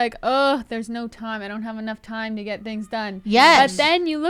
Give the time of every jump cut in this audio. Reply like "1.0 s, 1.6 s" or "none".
none